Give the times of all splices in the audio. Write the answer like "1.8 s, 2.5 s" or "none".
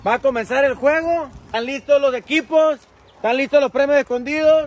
1.4 s